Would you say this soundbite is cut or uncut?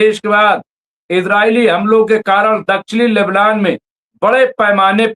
uncut